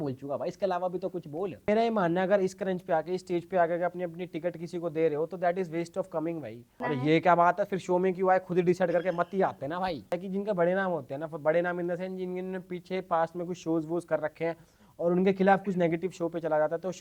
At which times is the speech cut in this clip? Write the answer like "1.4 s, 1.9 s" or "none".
1.7 s, 6.7 s, 10.2 s